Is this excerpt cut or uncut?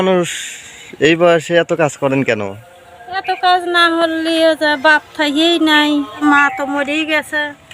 uncut